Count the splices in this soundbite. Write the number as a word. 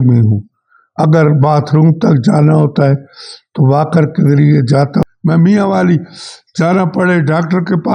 one